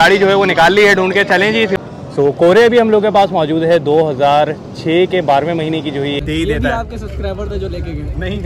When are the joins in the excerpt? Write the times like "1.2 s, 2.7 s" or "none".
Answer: 1.7 s, 6.2 s